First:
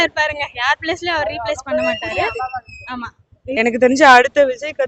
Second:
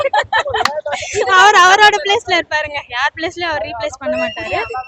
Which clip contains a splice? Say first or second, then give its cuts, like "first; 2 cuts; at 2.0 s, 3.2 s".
first; 1 cut; at 3.5 s